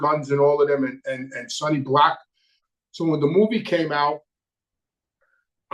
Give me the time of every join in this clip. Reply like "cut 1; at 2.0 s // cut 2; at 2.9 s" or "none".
cut 1; at 2.6 s